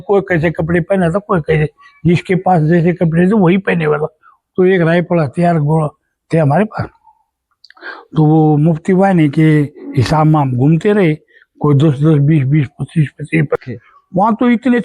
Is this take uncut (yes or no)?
no